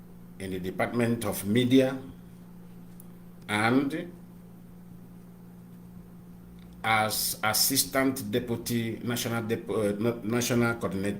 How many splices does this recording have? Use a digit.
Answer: 1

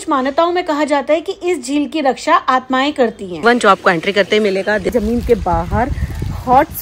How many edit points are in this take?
2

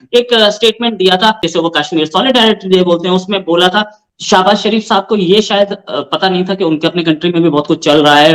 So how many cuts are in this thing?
1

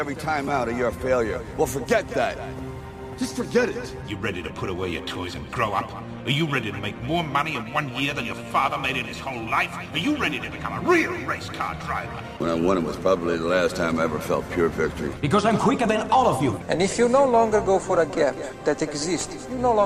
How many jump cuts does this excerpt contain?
0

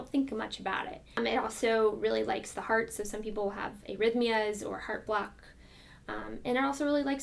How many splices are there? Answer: 1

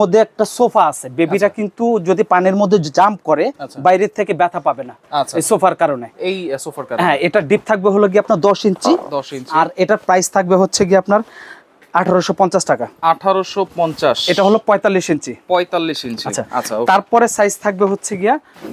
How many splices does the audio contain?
0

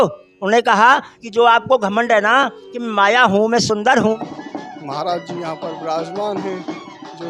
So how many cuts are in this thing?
1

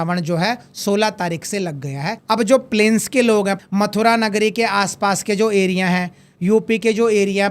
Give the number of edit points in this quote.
2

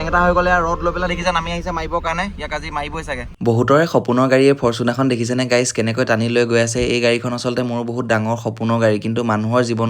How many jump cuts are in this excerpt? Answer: 1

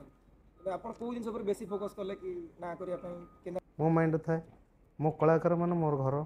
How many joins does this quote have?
1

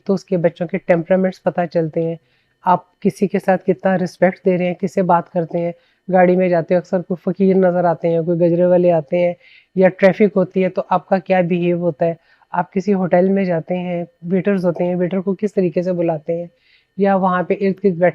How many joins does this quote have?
0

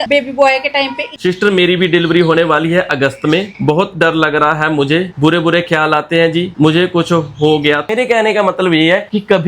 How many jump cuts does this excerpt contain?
2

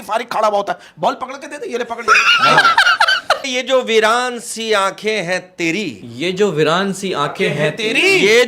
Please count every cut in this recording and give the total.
1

